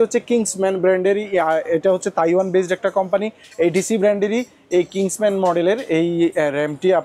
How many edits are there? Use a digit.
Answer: 0